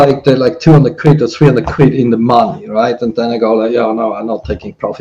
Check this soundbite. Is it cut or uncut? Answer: uncut